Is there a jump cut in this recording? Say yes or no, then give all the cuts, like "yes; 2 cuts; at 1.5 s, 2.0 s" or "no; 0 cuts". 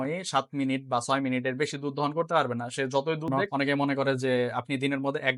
yes; 1 cut; at 3.4 s